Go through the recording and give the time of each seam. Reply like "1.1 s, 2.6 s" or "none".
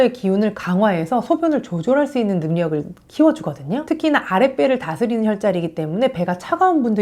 none